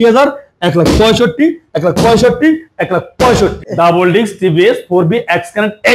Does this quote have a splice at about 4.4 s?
no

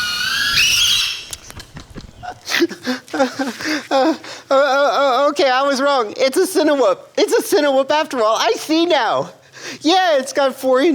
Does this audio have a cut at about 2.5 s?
yes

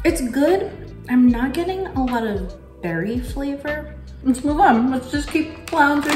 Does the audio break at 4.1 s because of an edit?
yes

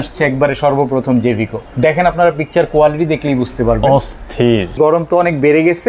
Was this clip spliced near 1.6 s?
yes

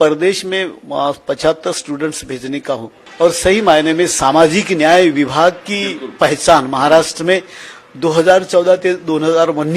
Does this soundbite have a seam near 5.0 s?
no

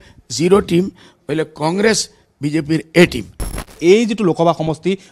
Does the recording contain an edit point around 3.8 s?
yes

